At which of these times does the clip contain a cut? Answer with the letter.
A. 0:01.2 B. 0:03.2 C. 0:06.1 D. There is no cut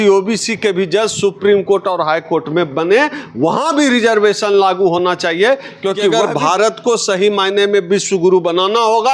C